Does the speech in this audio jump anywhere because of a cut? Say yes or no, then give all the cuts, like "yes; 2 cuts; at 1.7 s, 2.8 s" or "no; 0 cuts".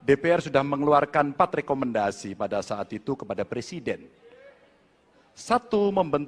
no; 0 cuts